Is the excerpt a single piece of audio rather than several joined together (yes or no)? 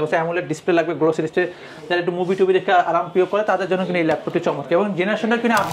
yes